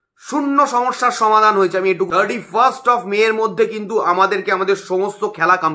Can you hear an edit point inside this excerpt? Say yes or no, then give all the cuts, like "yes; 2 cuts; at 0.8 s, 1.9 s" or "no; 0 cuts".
yes; 1 cut; at 2.1 s